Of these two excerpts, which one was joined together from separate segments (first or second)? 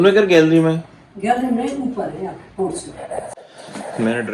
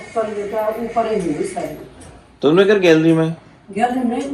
first